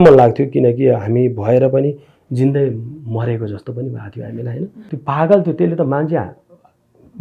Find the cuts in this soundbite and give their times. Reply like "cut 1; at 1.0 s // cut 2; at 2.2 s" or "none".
cut 1; at 4.8 s